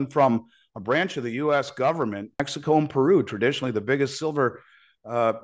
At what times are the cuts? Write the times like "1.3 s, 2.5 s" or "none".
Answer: 2.5 s